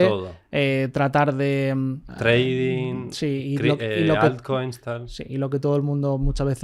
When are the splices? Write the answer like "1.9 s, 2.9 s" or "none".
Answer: 2.1 s